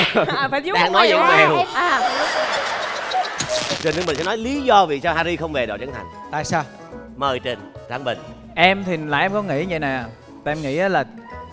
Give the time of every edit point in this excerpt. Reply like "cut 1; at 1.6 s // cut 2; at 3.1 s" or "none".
cut 1; at 3.6 s